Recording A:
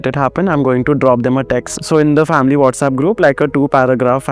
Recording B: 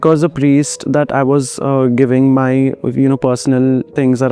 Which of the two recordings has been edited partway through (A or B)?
A